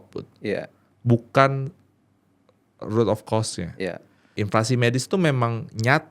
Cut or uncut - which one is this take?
cut